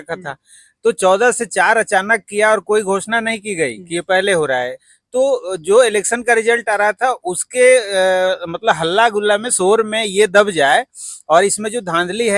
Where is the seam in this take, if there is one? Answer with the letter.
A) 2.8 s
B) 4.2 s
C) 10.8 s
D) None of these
D